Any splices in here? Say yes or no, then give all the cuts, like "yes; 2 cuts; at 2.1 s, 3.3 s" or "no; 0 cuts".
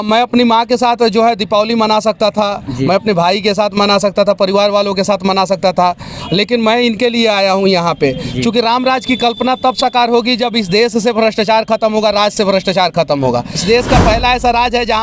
yes; 1 cut; at 13.6 s